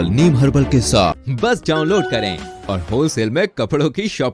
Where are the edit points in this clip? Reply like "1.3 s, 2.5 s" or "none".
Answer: 1.2 s

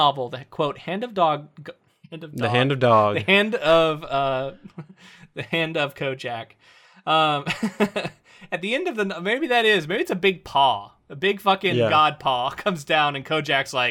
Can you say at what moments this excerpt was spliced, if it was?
none

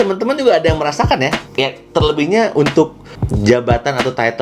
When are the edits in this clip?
1.4 s

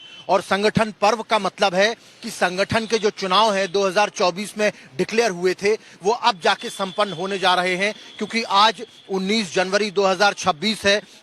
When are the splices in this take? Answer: none

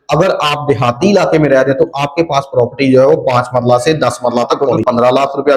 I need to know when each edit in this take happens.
4.6 s

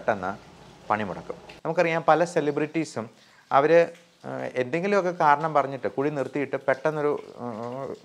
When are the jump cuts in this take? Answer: 1.4 s

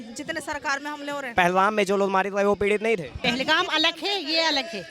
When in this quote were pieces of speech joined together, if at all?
1.2 s, 3.2 s

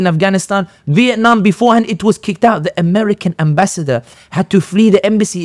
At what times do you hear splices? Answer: none

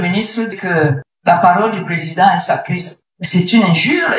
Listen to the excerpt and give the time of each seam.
none

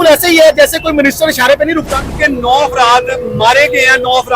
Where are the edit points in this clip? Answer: 1.9 s

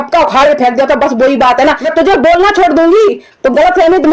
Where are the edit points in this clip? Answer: 1.8 s

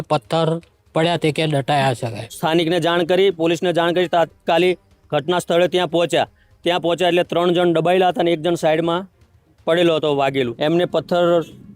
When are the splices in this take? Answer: 2.2 s, 10.5 s

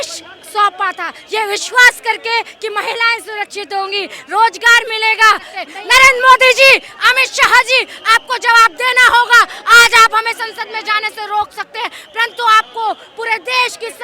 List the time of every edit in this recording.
5.7 s

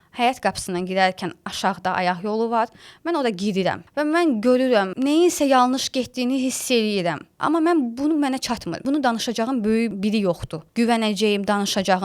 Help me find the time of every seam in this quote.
3.8 s, 4.9 s, 7.3 s, 8.8 s, 10.2 s

